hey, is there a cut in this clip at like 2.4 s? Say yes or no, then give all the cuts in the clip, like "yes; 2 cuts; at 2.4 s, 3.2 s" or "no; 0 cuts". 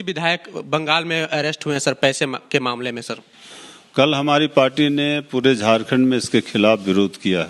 no; 0 cuts